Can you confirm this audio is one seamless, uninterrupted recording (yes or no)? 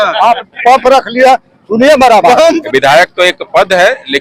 no